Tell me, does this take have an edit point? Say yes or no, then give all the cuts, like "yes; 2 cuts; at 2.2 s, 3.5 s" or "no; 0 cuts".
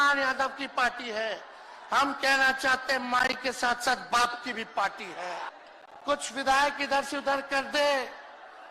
yes; 1 cut; at 5.5 s